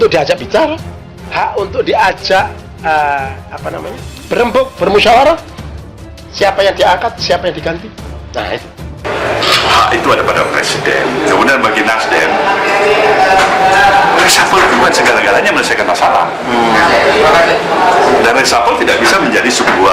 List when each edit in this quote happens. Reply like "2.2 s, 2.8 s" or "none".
9.0 s